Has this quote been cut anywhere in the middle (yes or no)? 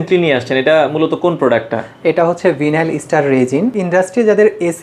yes